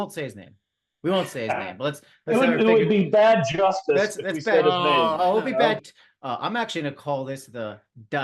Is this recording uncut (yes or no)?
no